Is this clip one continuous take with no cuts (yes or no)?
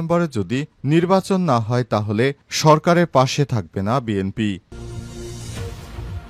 no